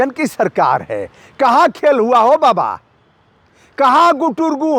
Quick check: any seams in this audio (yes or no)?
no